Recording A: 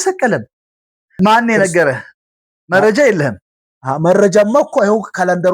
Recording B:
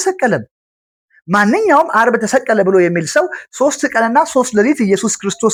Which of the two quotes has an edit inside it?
A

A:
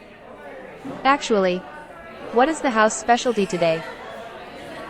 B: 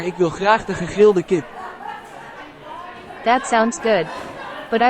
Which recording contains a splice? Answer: A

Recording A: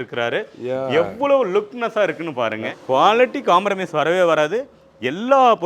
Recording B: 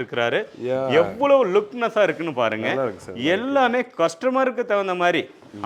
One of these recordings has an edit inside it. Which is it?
A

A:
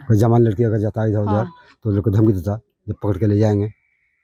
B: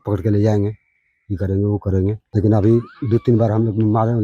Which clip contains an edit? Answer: B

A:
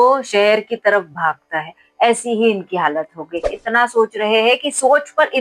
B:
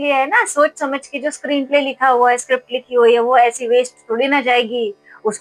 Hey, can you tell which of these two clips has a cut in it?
A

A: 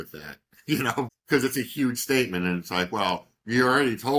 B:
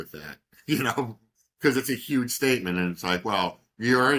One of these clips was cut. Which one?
A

